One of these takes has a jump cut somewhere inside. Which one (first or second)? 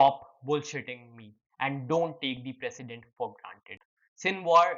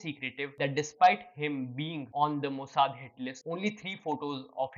first